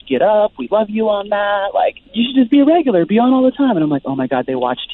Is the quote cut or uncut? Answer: cut